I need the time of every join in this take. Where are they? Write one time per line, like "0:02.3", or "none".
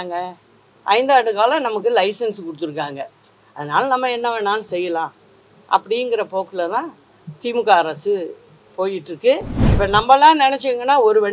0:09.6